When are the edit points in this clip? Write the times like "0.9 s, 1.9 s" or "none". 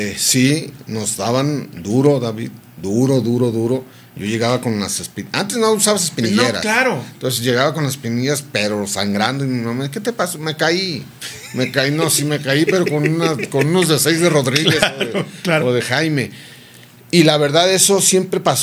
none